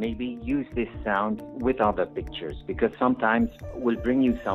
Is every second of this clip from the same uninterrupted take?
yes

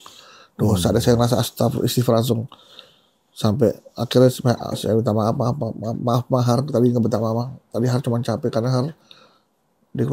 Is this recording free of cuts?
yes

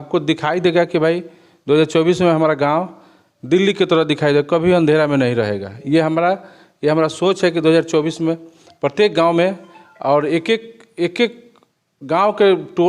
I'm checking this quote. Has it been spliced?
no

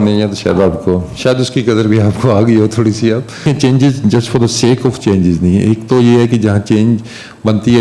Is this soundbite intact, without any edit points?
no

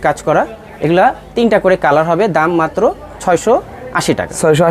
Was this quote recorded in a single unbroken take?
yes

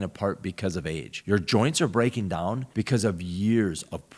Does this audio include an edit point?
yes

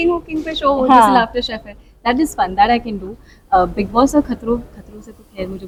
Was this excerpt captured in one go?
yes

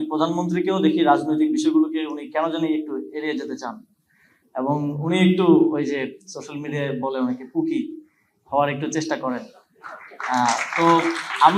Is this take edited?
no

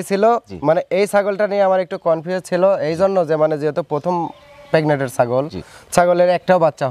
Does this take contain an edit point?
no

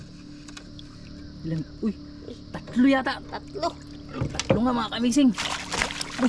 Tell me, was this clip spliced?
no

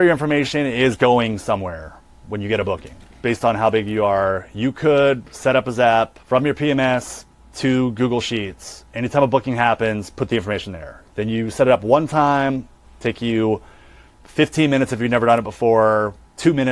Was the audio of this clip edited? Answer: yes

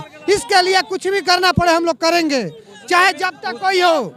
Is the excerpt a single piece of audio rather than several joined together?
yes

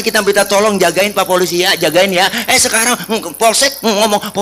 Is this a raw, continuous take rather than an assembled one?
yes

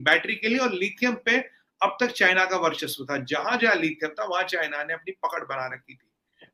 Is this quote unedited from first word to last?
yes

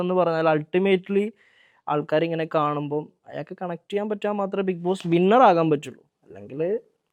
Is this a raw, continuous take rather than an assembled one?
yes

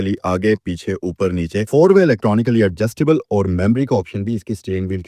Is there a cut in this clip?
no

